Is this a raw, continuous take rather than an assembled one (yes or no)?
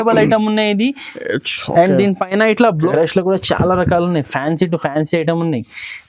no